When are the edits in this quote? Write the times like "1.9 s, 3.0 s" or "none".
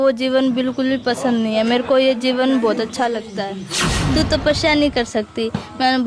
3.9 s